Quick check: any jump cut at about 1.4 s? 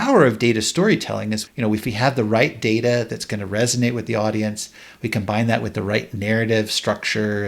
yes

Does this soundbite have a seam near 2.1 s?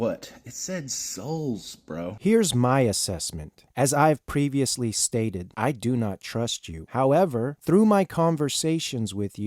yes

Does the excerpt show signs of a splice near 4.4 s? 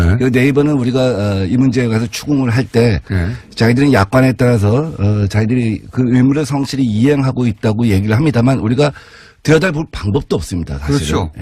yes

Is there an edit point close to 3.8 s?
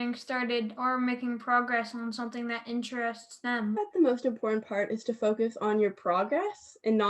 yes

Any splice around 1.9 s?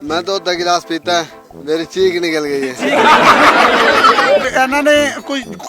no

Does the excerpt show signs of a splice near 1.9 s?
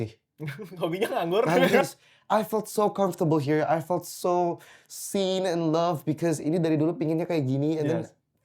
yes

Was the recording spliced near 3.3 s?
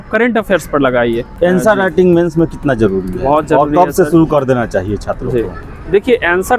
no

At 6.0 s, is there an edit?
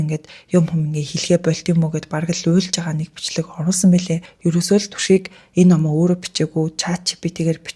no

